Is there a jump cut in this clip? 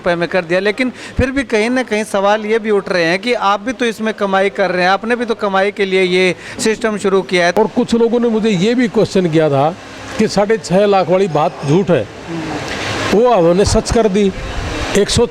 yes; 1 cut; at 7.5 s

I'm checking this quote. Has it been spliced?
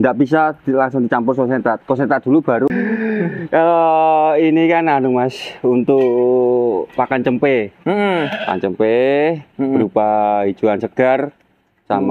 yes; 1 cut; at 2.7 s

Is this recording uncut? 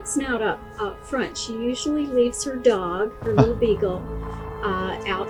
yes; 0 cuts

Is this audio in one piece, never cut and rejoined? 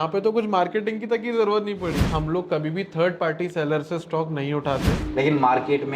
no; 2 cuts; at 2.0 s, 4.9 s

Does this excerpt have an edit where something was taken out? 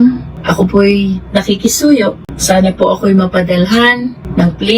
no; 0 cuts

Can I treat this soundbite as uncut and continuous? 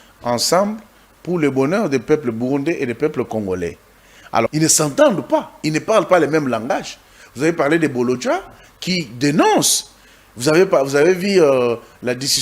no; 1 cut; at 4.5 s

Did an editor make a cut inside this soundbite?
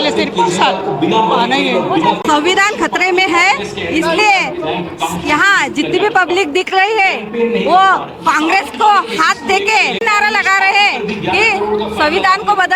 yes; 2 cuts; at 2.1 s, 10.0 s

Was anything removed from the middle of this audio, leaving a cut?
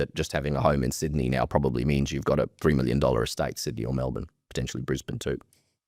no; 0 cuts

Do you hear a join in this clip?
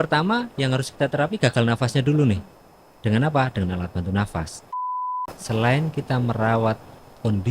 yes; 1 cut; at 5.1 s

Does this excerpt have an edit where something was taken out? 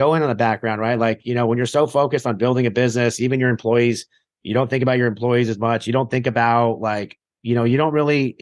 no; 0 cuts

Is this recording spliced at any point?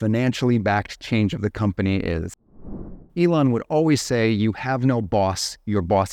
yes; 1 cut; at 2.8 s

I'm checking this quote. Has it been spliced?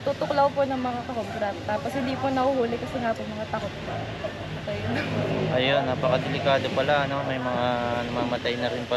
no; 0 cuts

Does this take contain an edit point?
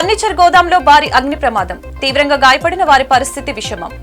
no; 0 cuts

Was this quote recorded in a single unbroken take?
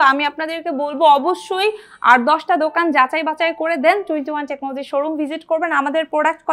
yes; 0 cuts

